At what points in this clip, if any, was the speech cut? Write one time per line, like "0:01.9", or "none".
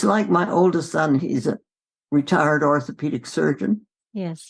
none